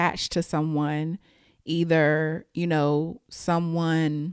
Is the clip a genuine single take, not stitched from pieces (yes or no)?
yes